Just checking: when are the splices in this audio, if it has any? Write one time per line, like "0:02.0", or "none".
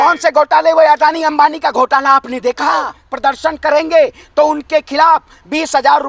0:03.0